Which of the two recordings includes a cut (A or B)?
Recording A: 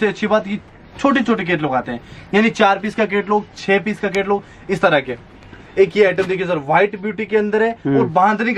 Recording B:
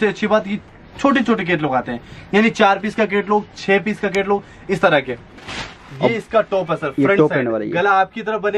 B